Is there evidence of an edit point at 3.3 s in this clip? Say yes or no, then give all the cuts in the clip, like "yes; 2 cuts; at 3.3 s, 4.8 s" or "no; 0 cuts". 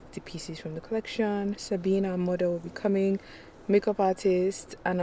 no; 0 cuts